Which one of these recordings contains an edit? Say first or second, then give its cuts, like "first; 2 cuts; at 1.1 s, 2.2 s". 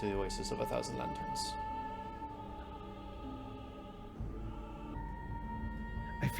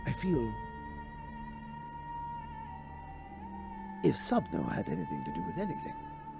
first; 1 cut; at 4.9 s